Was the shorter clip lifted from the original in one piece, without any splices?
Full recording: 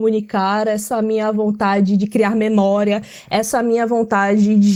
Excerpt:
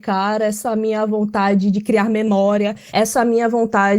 no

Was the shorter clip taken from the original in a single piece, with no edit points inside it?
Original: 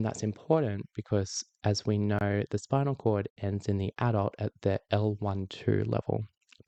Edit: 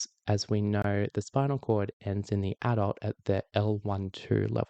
yes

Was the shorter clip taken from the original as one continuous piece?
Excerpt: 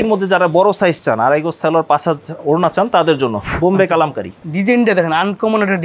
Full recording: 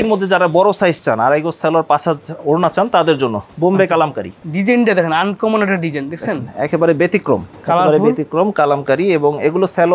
yes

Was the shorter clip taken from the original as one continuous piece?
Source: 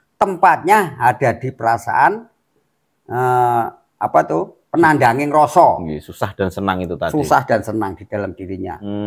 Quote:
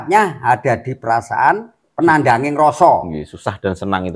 no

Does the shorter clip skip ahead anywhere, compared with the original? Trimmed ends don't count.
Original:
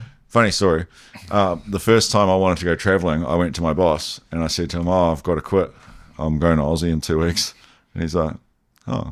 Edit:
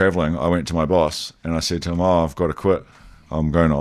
no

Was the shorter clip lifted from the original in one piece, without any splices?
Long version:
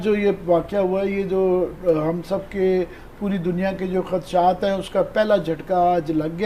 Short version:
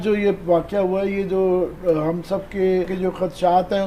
no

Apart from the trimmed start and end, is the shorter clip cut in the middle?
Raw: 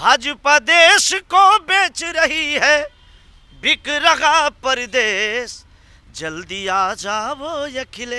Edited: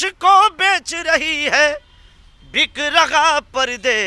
no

